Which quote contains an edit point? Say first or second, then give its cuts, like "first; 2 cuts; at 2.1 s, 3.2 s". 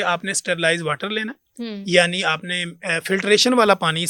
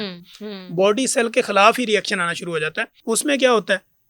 second; 1 cut; at 2.9 s